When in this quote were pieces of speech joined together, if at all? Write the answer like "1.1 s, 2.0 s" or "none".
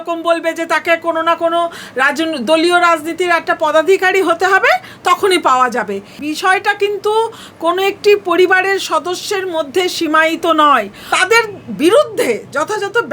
6.1 s, 11.0 s